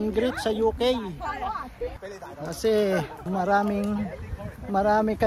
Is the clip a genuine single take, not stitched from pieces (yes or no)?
no